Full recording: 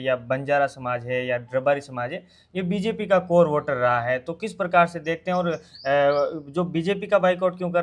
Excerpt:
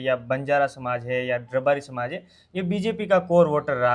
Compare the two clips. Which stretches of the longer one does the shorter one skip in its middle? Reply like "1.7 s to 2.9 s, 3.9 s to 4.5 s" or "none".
none